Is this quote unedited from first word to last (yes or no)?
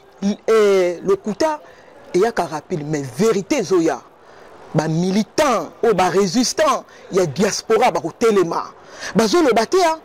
yes